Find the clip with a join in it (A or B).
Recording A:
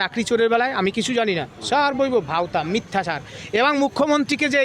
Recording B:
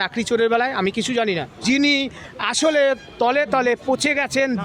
B